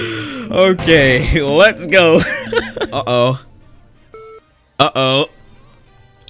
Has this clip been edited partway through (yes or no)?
yes